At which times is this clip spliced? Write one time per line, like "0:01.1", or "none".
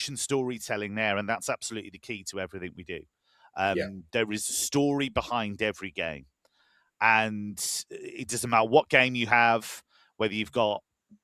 none